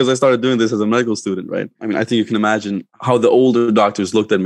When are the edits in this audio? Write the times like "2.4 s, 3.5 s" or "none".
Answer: 1.8 s, 2.9 s